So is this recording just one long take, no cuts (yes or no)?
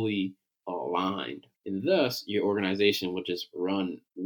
no